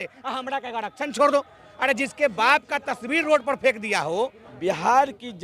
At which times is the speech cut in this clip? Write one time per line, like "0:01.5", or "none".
0:01.6
0:04.4